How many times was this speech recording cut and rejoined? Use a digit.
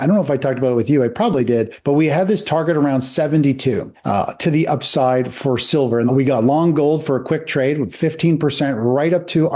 2